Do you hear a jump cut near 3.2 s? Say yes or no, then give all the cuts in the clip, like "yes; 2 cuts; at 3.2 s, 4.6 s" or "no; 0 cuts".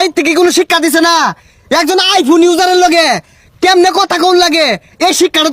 no; 0 cuts